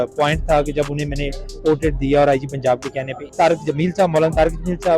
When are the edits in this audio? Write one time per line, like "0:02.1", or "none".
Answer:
0:03.2